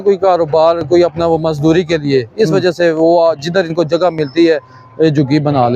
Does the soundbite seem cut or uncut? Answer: uncut